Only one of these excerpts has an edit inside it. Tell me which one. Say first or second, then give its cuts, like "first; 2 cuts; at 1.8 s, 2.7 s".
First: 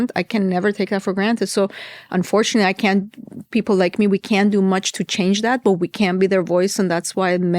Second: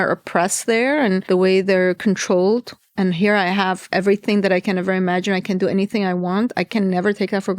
second; 1 cut; at 1.2 s